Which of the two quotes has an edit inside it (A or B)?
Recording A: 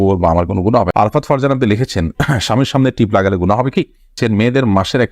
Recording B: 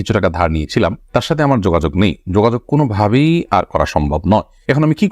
A